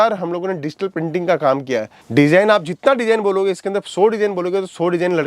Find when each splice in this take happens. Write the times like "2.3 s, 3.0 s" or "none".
2.0 s